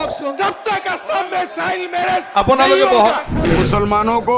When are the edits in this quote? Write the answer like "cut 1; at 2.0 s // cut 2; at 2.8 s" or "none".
cut 1; at 3.4 s